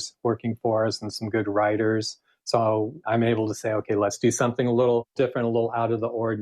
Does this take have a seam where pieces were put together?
yes; 3 cuts; at 3.0 s, 4.2 s, 5.1 s

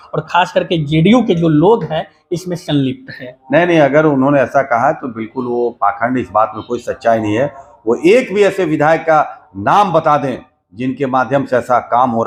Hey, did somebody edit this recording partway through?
no; 0 cuts

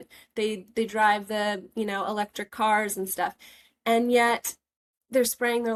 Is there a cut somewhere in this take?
no; 0 cuts

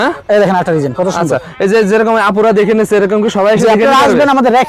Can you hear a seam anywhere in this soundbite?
no; 0 cuts

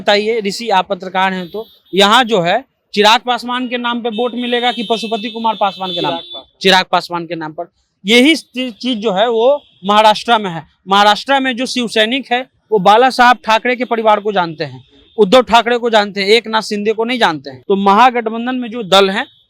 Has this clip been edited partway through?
yes; 1 cut; at 17.5 s

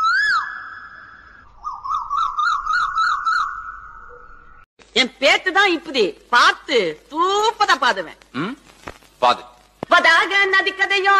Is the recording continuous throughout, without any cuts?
no; 1 cut; at 4.8 s

